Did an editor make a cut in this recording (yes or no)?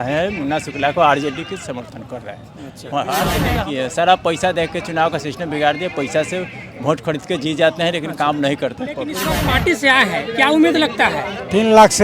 yes